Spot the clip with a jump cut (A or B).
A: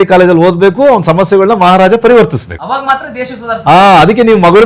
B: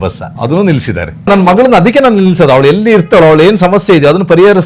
B